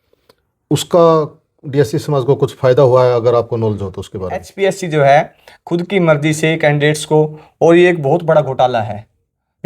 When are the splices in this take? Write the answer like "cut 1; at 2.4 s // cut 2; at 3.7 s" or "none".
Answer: cut 1; at 4.5 s

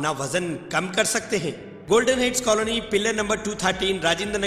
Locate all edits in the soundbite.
cut 1; at 1.7 s

